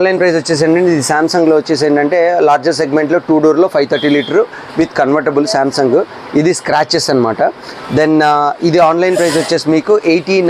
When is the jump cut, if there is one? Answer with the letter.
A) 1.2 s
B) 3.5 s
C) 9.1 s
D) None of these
D